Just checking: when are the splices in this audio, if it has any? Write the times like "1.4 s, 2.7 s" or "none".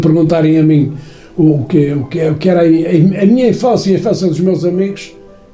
none